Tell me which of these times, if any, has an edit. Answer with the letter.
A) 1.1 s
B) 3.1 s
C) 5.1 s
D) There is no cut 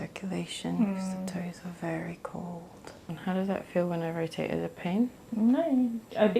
B